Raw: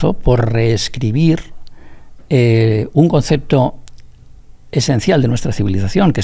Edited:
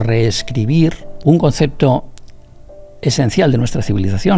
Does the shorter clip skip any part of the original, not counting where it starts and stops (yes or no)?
yes